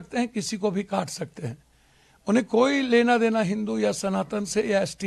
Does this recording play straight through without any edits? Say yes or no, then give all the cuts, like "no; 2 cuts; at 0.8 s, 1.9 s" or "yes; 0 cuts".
yes; 0 cuts